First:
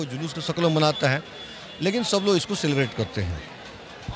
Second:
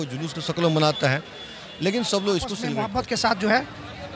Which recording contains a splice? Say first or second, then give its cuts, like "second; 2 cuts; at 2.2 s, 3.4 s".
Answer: second; 1 cut; at 2.8 s